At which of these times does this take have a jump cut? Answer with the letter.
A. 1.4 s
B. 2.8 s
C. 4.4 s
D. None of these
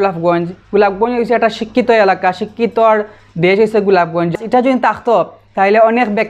C